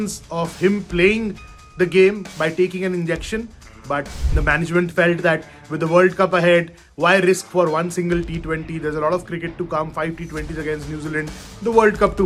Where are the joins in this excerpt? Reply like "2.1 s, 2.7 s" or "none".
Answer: none